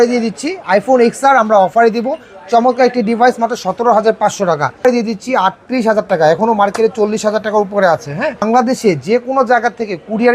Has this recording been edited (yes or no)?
yes